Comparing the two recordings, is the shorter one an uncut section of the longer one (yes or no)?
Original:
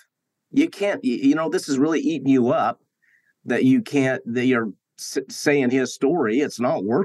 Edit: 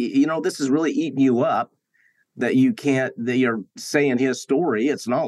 no